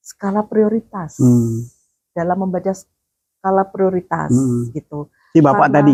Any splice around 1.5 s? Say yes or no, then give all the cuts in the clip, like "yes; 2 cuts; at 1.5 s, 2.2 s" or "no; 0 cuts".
no; 0 cuts